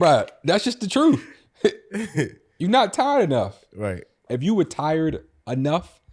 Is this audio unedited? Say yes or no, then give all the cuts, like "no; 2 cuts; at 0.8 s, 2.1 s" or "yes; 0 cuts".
no; 1 cut; at 4.3 s